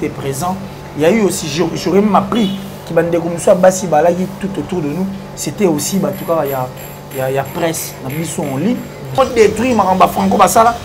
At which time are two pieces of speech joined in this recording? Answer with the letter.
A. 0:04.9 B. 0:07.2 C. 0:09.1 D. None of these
C